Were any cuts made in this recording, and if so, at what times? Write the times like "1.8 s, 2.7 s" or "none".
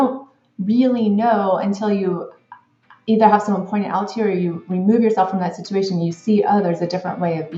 none